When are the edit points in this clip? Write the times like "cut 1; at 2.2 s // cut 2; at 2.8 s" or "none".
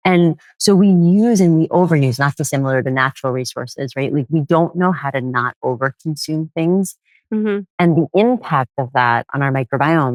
none